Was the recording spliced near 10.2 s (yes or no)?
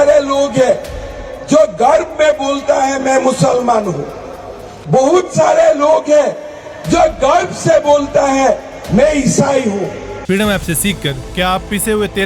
yes